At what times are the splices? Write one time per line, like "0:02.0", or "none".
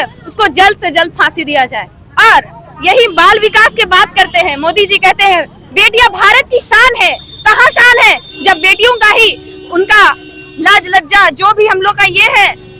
none